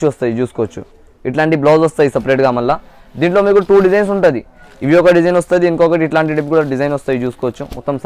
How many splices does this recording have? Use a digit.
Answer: 0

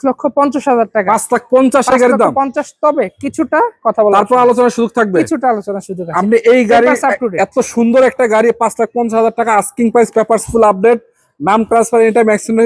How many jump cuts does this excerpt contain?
0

